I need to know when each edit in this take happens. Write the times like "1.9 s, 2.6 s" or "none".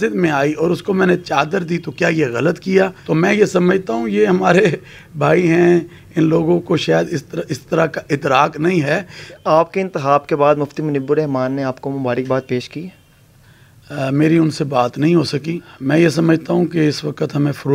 3.0 s, 9.3 s, 15.7 s